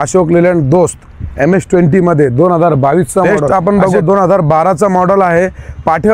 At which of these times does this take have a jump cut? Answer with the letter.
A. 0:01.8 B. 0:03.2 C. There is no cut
B